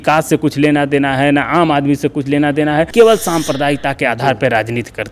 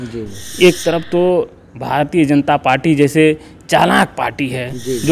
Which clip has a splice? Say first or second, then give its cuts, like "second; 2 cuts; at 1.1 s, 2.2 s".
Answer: first; 1 cut; at 2.9 s